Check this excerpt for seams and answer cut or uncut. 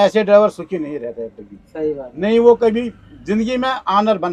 uncut